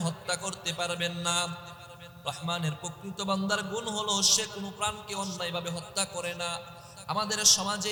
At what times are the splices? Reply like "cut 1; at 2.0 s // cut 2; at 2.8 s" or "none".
none